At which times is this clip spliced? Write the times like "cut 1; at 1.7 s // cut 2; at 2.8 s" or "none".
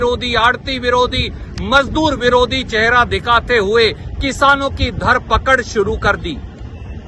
none